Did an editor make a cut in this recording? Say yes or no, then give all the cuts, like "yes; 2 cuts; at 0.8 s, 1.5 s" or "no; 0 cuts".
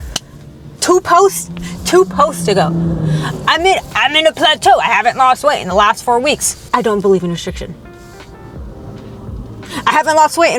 no; 0 cuts